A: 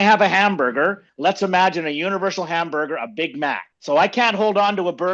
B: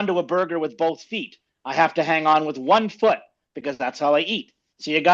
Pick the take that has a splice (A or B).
A